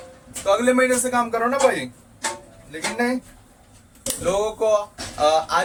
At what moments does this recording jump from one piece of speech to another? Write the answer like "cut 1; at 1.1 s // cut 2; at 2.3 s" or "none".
none